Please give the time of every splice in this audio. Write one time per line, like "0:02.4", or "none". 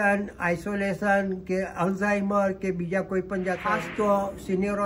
0:03.6